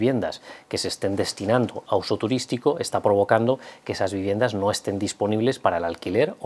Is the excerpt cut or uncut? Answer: uncut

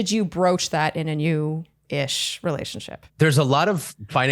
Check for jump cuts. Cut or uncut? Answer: cut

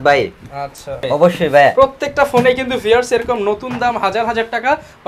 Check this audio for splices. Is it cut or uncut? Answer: cut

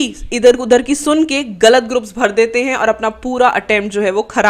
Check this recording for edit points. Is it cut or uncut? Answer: uncut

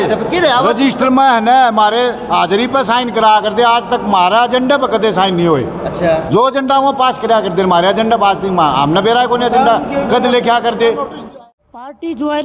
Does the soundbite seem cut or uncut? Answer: cut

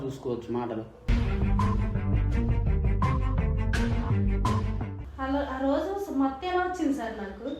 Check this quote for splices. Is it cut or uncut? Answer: cut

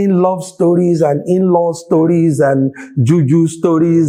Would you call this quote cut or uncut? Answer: uncut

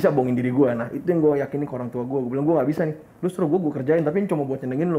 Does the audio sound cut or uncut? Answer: uncut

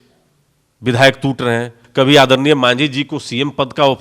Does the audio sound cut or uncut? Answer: cut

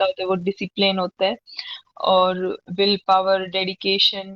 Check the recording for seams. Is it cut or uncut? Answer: uncut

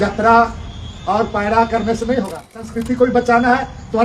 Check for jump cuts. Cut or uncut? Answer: cut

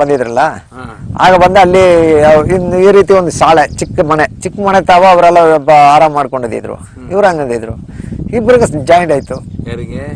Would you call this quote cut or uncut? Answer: uncut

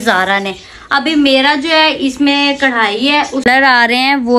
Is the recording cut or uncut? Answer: cut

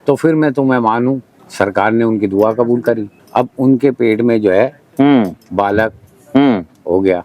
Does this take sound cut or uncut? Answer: cut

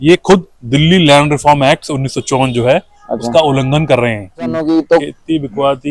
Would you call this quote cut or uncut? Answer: cut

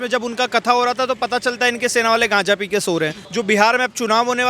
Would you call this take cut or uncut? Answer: cut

